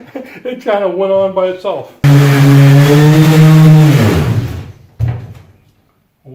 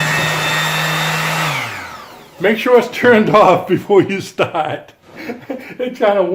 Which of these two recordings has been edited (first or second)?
first